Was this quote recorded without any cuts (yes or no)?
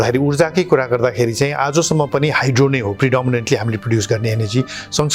yes